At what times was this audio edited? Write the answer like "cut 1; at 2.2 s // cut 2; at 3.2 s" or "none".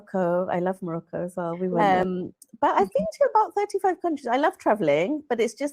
cut 1; at 1.8 s

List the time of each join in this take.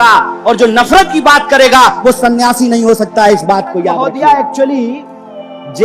cut 1; at 4.1 s

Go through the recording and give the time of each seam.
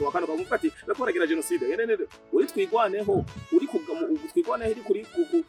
none

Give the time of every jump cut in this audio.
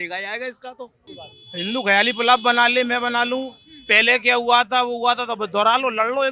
cut 1; at 1.2 s

